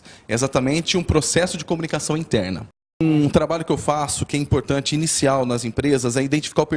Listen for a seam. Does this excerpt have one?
yes; 1 cut; at 3.0 s

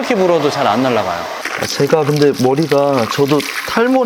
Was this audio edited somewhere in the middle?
yes; 1 cut; at 1.5 s

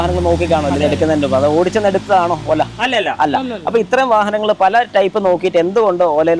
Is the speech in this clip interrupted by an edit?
no; 0 cuts

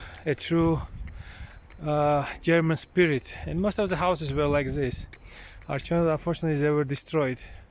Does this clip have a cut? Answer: no; 0 cuts

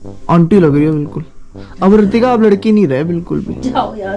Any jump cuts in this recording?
no; 0 cuts

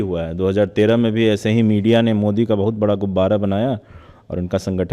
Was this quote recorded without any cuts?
yes; 0 cuts

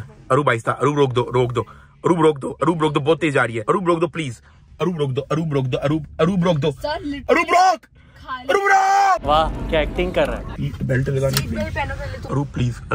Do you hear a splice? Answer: no; 0 cuts

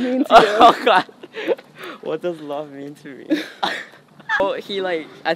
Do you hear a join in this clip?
yes; 1 cut; at 4.4 s

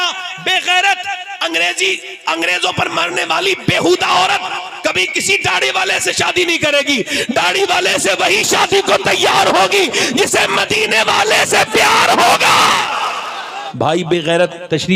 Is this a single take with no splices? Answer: no; 1 cut; at 13.6 s

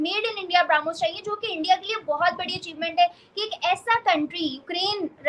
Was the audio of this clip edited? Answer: no; 0 cuts

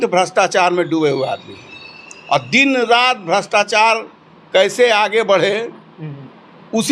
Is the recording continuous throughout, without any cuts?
yes; 0 cuts

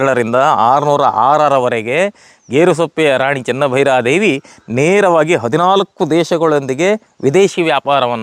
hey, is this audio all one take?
yes; 0 cuts

